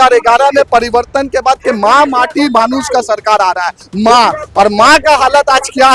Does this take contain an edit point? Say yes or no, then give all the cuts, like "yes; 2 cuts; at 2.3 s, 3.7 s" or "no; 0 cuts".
yes; 1 cut; at 3.8 s